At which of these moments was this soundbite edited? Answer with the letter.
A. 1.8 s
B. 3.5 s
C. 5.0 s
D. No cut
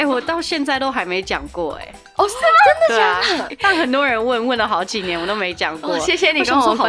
B